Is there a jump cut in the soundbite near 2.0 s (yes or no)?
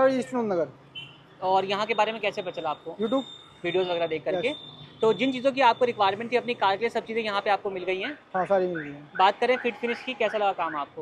no